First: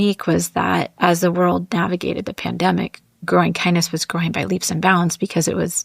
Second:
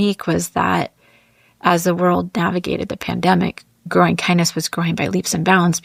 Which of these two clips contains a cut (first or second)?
first